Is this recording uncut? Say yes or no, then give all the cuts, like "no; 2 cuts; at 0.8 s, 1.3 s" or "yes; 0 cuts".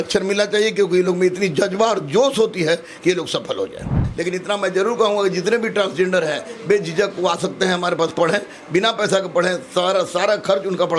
no; 1 cut; at 4.0 s